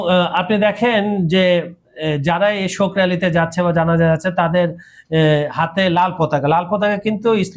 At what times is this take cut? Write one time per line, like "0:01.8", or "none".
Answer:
none